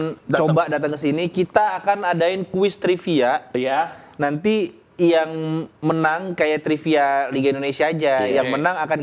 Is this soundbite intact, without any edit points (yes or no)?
yes